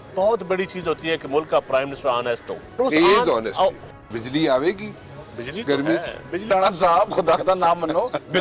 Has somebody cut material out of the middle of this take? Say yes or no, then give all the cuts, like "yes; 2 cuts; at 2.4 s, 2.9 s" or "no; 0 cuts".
yes; 3 cuts; at 2.8 s, 3.8 s, 6.5 s